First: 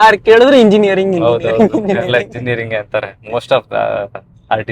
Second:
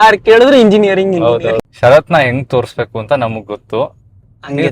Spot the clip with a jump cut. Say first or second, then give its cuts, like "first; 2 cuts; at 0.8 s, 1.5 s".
second; 1 cut; at 1.6 s